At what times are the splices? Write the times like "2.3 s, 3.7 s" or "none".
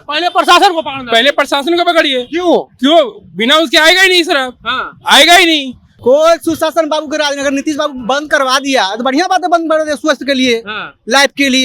5.8 s